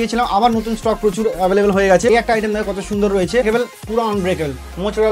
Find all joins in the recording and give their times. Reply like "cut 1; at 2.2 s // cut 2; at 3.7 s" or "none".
cut 1; at 2.1 s // cut 2; at 3.4 s